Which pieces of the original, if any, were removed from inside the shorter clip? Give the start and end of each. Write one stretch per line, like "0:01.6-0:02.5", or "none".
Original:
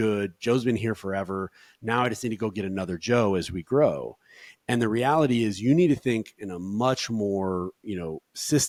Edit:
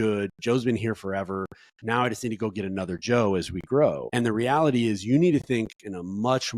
0:04.0-0:04.6